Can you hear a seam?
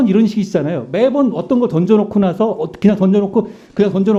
no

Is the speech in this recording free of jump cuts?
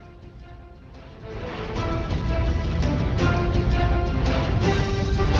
no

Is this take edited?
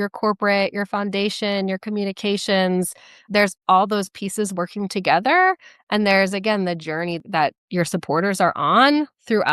yes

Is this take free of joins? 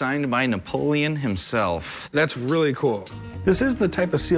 yes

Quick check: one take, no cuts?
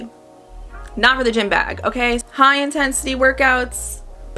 no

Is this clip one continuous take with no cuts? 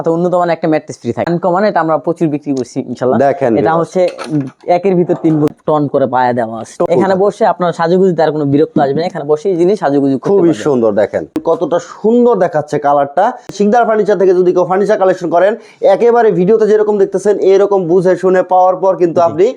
no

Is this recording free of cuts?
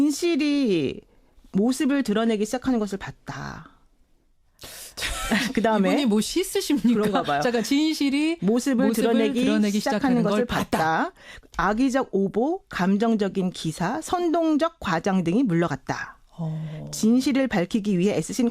no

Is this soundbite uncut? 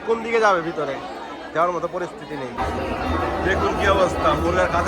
no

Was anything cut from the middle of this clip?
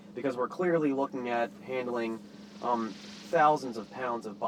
no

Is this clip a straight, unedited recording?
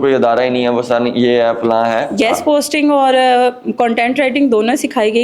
no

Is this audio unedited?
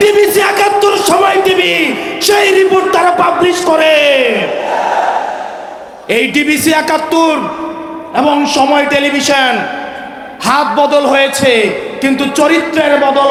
yes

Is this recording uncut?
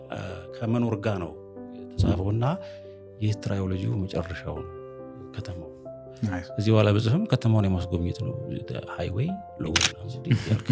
yes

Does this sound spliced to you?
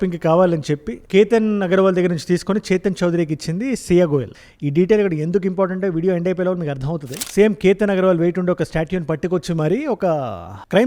yes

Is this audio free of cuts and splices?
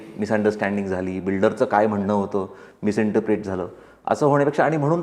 yes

